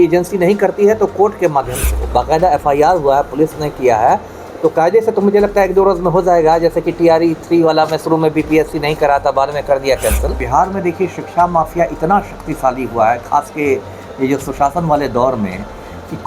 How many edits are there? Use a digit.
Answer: 2